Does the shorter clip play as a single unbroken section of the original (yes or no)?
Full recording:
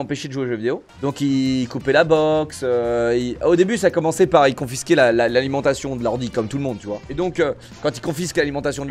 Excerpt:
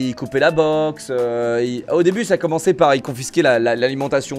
yes